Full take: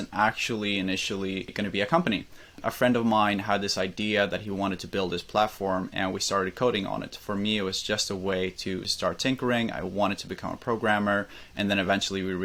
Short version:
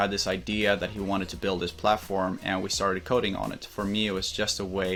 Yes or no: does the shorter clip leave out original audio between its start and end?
no